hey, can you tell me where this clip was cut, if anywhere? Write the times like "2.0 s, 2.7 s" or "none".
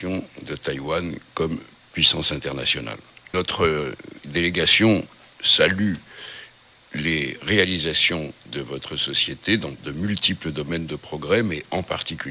3.3 s